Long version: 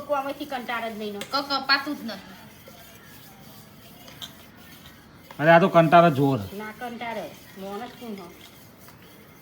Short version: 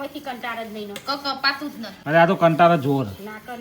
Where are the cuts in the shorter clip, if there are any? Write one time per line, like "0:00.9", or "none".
0:02.0

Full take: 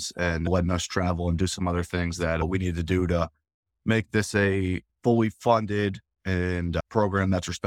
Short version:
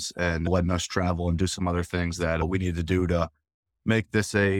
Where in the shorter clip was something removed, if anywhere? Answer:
none

